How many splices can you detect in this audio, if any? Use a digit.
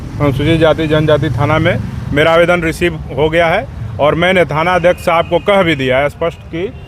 0